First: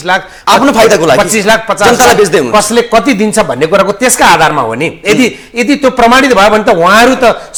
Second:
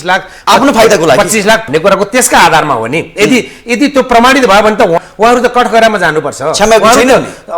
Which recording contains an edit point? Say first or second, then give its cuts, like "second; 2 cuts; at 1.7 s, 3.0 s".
second; 2 cuts; at 1.6 s, 5.0 s